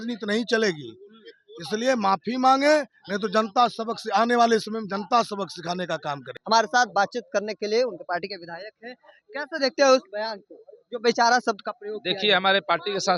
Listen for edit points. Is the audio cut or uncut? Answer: uncut